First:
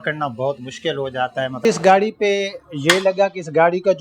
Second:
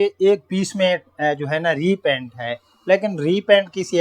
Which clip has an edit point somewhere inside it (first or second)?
first